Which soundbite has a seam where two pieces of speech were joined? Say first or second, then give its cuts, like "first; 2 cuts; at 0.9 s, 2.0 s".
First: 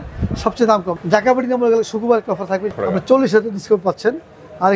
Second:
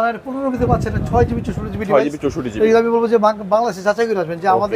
first; 2 cuts; at 0.9 s, 2.7 s